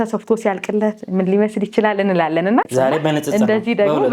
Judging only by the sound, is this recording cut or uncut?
cut